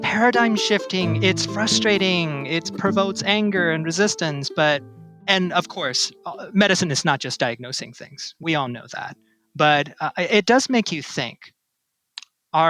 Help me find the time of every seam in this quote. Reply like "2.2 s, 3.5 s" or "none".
1.1 s

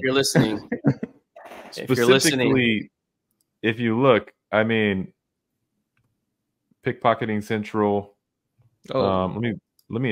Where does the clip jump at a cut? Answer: none

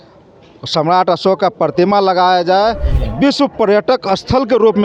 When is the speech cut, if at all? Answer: 2.9 s

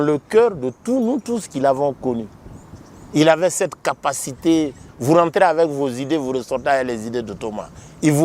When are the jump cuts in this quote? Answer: 4.9 s

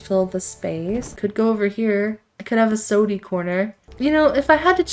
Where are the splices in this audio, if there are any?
1.1 s, 3.8 s

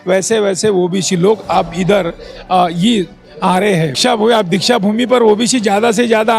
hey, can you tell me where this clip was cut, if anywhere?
4.0 s

